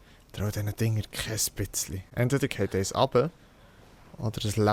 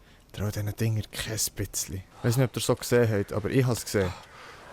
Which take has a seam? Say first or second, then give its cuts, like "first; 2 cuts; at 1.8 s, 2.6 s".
second; 1 cut; at 2.1 s